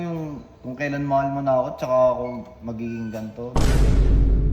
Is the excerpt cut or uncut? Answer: cut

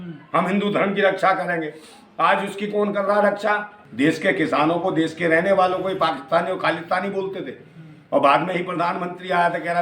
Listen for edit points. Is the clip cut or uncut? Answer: cut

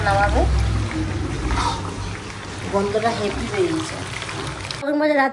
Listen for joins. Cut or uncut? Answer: uncut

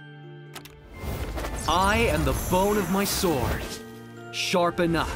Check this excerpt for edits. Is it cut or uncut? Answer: cut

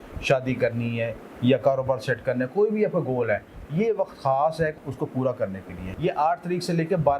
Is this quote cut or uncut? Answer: cut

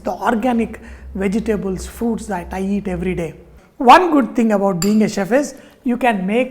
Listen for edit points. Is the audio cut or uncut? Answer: cut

